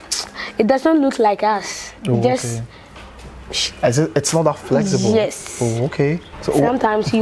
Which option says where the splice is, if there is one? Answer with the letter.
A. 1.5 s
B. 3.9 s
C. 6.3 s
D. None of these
C